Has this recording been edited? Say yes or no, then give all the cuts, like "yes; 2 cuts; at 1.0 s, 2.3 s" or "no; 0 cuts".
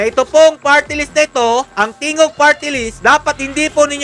no; 0 cuts